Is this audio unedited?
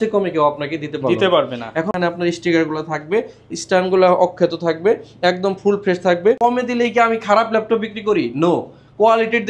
no; 2 cuts; at 1.9 s, 6.4 s

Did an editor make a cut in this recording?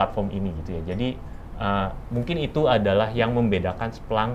no; 0 cuts

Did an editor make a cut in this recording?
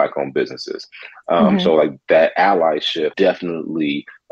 yes; 1 cut; at 3.1 s

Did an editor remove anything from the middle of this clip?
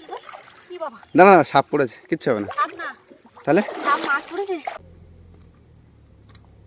yes; 1 cut; at 4.8 s

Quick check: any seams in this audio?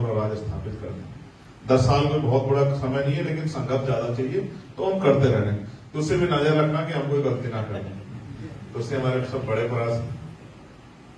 no; 0 cuts

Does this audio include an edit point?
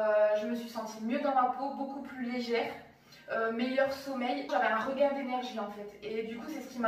yes; 1 cut; at 4.5 s

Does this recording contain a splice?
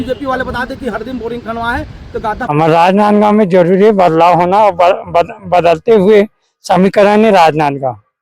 yes; 1 cut; at 2.4 s

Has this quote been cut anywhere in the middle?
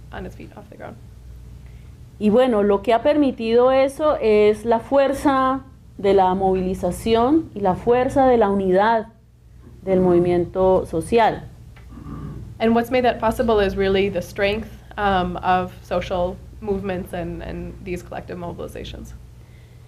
no; 0 cuts

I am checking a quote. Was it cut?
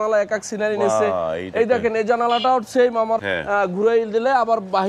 yes; 1 cut; at 3.2 s

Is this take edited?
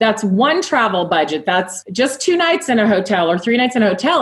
yes; 1 cut; at 1.8 s

